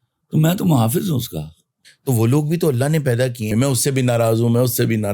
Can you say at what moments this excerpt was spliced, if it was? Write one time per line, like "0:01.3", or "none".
0:03.5